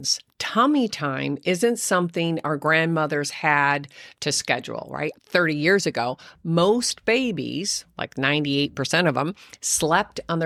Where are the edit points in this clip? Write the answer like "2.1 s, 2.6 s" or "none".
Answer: none